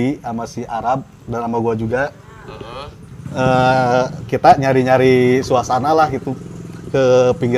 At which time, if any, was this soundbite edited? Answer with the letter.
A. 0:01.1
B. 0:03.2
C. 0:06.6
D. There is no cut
D